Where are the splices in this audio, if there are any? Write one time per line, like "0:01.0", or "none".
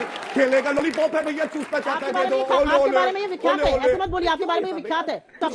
none